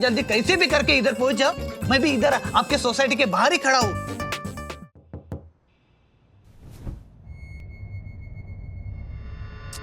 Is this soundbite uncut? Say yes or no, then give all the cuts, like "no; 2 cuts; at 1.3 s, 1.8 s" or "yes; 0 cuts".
no; 1 cut; at 4.6 s